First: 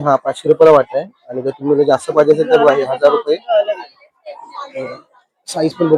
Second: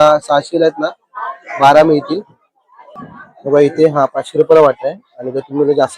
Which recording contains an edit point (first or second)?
second